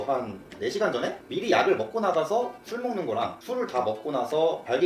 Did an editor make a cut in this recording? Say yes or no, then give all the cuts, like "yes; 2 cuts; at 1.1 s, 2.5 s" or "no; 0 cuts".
no; 0 cuts